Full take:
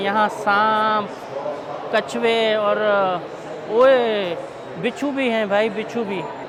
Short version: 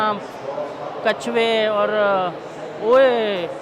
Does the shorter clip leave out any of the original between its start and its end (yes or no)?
no